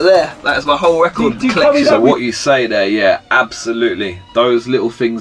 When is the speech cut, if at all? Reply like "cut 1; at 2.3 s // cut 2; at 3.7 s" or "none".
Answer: cut 1; at 2.0 s